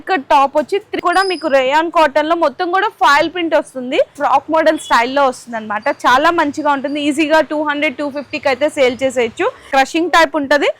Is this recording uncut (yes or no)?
no